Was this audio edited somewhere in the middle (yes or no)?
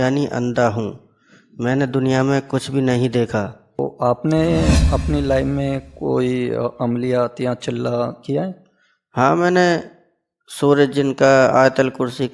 yes